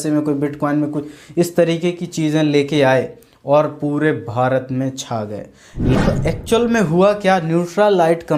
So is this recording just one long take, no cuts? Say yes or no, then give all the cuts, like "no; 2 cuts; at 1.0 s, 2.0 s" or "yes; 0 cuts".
no; 1 cut; at 5.9 s